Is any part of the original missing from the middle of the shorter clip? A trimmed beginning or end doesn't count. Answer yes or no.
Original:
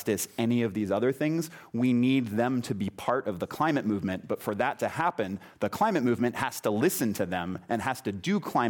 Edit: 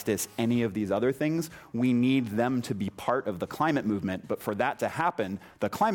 no